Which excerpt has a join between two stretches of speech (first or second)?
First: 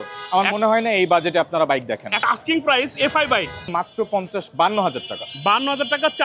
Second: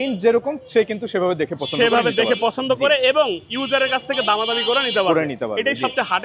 first